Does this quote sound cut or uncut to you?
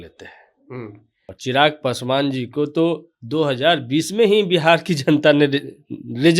cut